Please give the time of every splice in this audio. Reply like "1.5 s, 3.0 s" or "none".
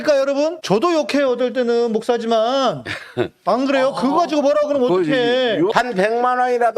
5.7 s